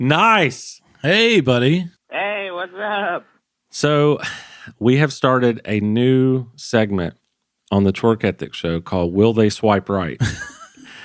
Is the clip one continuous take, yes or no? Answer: no